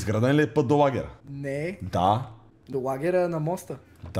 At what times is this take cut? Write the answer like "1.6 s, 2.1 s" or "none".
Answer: none